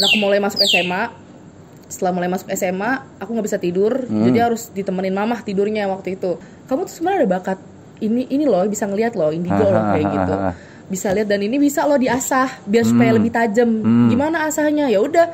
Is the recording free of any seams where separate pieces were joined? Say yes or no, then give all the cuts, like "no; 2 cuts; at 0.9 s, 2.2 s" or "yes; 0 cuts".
no; 1 cut; at 6.4 s